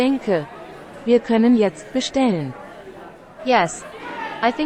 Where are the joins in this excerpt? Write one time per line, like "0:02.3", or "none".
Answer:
none